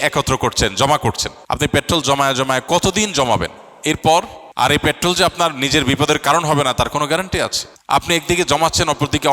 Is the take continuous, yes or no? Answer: no